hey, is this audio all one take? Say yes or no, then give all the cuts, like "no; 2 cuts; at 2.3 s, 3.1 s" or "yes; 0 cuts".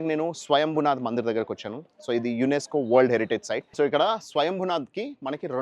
no; 1 cut; at 3.7 s